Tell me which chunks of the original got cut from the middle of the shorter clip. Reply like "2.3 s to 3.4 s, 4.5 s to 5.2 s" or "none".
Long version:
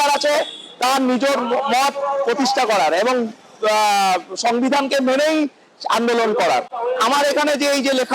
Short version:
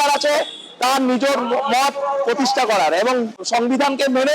3.4 s to 4.3 s